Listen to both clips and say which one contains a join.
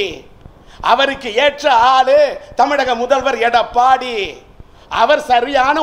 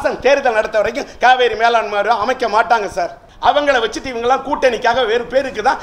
second; 1 cut; at 3.2 s

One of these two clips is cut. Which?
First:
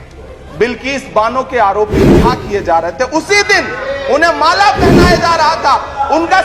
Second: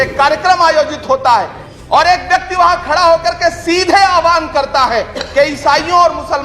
second; 1 cut; at 1.6 s

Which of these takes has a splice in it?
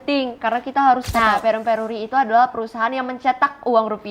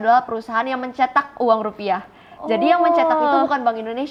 first; 1 cut; at 1.1 s

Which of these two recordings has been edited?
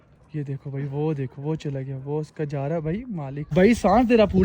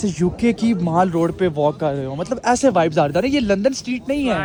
first; 1 cut; at 3.5 s

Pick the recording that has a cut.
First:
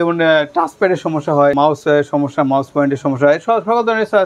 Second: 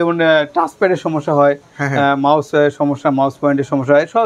first; 1 cut; at 1.5 s

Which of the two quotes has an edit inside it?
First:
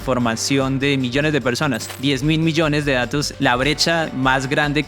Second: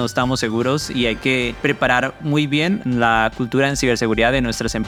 first; 1 cut; at 1.9 s

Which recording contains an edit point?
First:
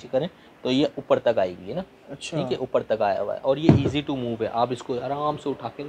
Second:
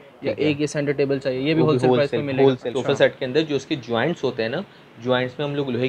second; 1 cut; at 2.6 s

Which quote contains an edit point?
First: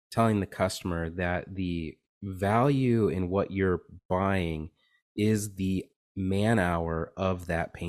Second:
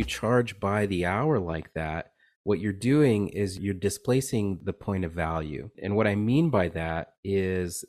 second; 3 cuts; at 3.6 s, 4.6 s, 5.8 s

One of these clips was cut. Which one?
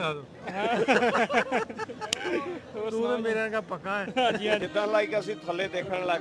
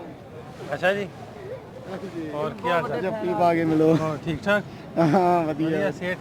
first; 1 cut; at 4.6 s

